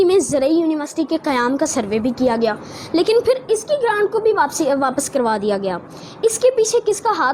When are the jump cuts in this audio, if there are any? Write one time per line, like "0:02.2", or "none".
none